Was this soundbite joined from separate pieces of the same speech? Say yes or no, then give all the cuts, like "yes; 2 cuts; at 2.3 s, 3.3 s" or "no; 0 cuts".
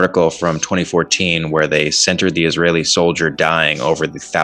no; 0 cuts